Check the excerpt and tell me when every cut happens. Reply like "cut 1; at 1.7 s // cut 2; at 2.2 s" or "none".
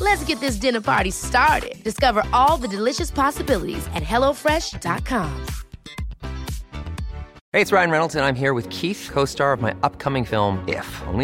cut 1; at 7.4 s